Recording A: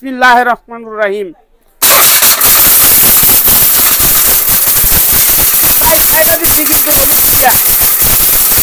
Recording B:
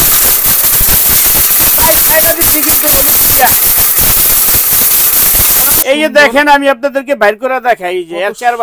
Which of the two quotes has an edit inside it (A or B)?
B